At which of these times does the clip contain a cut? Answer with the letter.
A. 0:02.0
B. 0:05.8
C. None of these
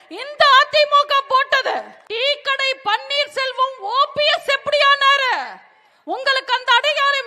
A